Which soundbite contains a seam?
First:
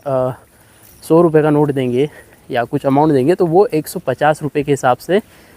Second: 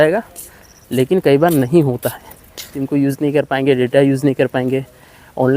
second; 1 cut; at 2.8 s

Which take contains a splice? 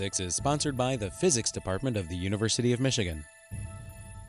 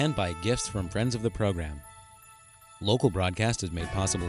first; 1 cut; at 3.4 s

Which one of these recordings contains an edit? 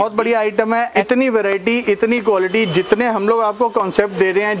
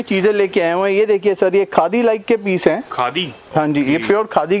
first; 1 cut; at 1.0 s

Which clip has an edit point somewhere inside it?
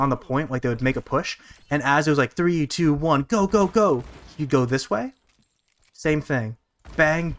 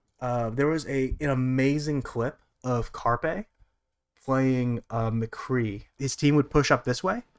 second; 1 cut; at 6.0 s

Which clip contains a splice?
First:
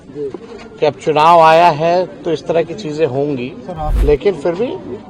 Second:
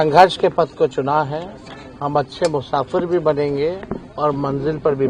first; 1 cut; at 3.9 s

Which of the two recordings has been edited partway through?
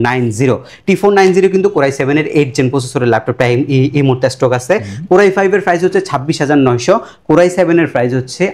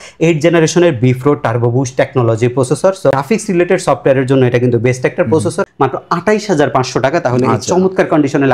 second; 2 cuts; at 3.1 s, 5.6 s

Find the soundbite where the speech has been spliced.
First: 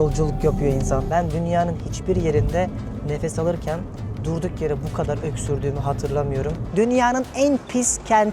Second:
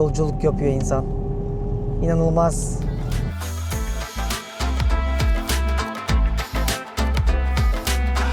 first; 2 cuts; at 1.1 s, 6.7 s

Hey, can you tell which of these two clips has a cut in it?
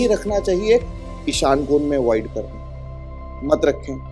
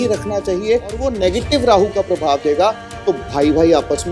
second; 1 cut; at 1.2 s

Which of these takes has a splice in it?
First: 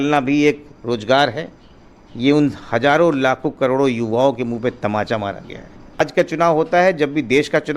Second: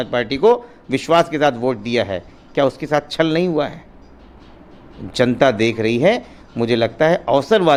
first; 1 cut; at 6.0 s

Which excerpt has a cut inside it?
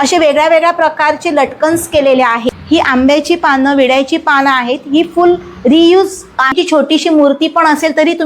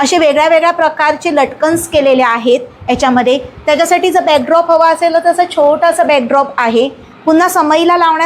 first; 2 cuts; at 2.4 s, 6.5 s

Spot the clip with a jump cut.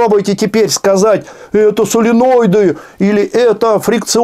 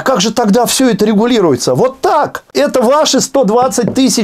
second; 1 cut; at 2.4 s

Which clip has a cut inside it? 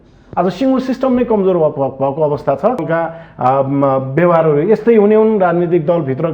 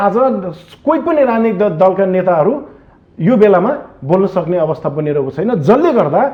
first; 1 cut; at 2.8 s

